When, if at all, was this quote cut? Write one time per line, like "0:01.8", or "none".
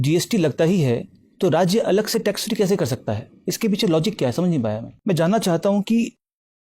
0:04.9